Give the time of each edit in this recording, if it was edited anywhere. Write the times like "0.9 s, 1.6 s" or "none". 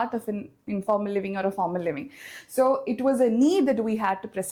none